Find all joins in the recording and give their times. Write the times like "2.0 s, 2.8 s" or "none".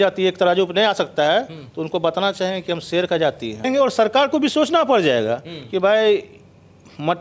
3.7 s